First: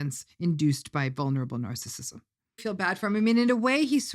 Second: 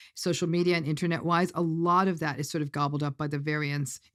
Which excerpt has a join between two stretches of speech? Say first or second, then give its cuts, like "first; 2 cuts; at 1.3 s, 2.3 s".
first; 1 cut; at 2.5 s